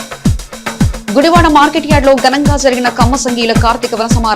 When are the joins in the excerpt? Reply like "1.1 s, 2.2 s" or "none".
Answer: 1.0 s